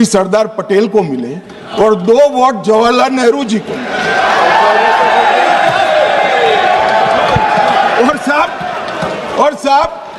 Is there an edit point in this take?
no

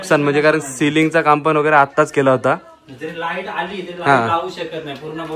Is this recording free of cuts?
yes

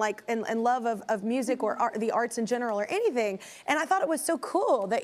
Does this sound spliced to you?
no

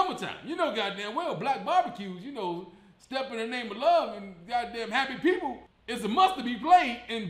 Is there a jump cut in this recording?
no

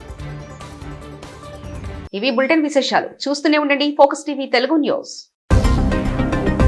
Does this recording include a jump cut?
no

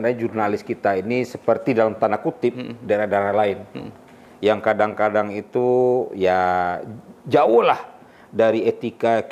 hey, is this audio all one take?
yes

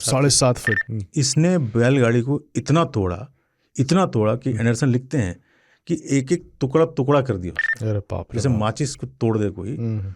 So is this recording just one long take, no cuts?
no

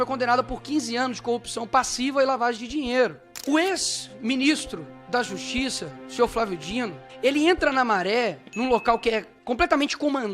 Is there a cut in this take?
yes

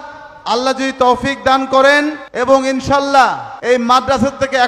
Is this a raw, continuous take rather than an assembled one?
no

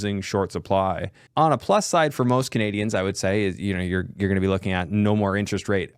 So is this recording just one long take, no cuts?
no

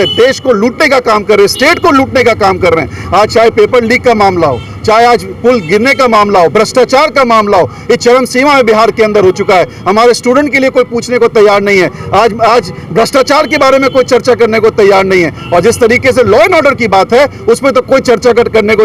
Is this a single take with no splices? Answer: yes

